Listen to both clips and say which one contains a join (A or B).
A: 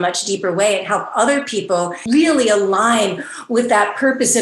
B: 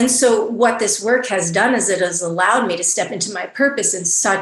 A